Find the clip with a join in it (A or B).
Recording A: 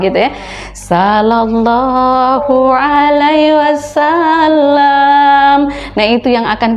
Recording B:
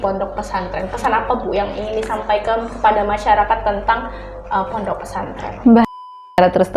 B